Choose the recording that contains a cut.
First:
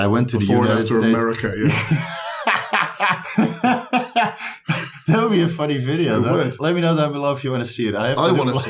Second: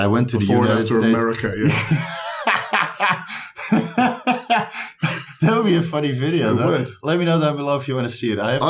first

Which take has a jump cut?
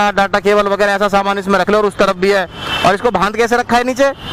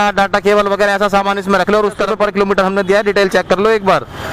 second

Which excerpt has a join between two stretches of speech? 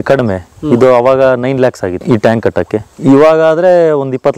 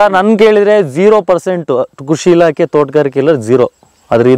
first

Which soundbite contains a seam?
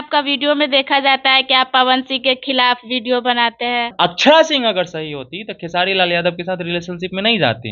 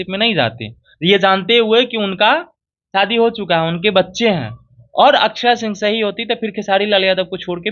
first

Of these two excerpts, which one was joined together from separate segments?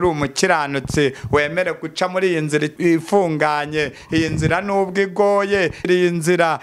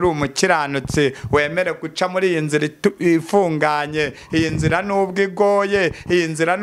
first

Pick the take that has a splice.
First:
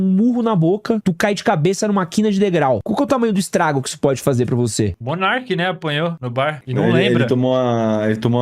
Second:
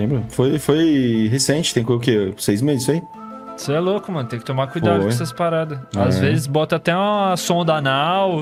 first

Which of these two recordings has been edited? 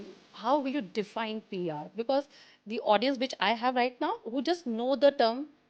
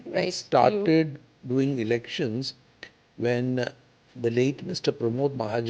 first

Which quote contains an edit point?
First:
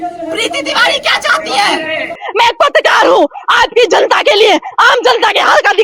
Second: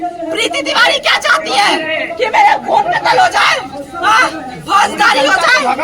first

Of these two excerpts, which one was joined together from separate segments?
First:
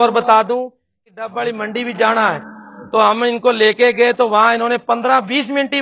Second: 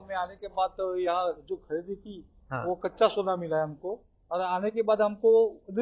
first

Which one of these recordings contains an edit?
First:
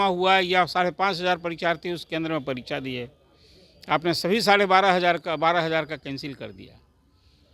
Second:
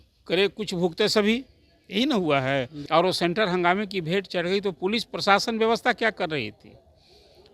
second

